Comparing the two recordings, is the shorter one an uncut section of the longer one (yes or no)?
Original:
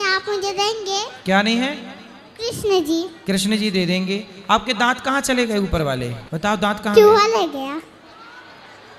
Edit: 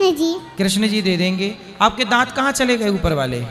yes